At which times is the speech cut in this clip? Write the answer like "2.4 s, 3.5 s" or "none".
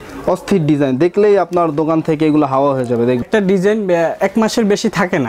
3.2 s